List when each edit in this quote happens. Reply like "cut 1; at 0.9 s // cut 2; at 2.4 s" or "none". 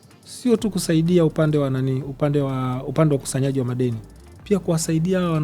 none